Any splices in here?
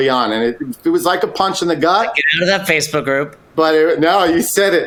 no; 0 cuts

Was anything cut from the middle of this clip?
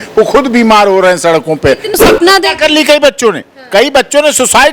yes; 1 cut; at 2.0 s

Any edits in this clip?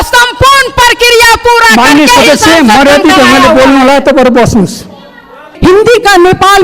yes; 1 cut; at 5.5 s

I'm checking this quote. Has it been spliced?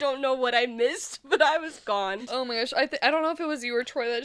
yes; 1 cut; at 2.2 s

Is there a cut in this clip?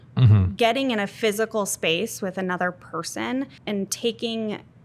yes; 1 cut; at 3.6 s

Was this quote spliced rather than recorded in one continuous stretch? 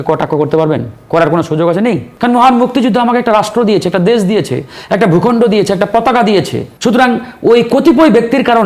yes; 2 cuts; at 2.1 s, 6.6 s

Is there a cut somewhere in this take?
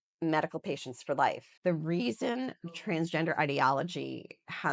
yes; 1 cut; at 1.5 s

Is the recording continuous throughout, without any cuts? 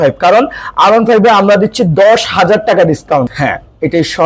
no; 1 cut; at 3.3 s

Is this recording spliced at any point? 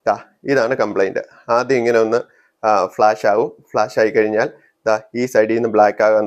no; 0 cuts

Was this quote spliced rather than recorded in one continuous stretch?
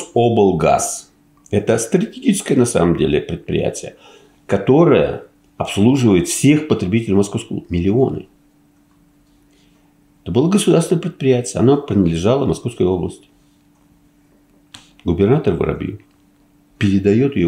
no; 0 cuts

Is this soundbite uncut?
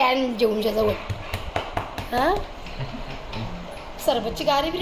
yes; 0 cuts

